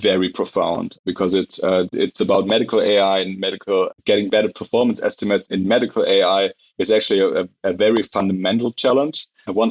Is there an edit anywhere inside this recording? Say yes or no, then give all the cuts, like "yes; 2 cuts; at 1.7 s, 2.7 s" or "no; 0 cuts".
no; 0 cuts